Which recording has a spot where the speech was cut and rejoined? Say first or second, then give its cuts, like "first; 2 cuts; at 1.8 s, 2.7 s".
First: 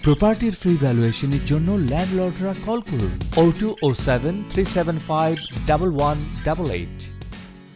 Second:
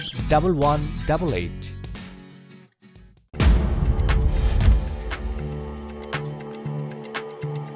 second; 1 cut; at 3.3 s